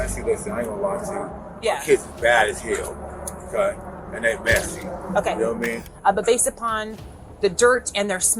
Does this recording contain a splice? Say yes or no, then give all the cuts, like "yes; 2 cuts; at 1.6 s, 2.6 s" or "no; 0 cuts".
yes; 1 cut; at 5.9 s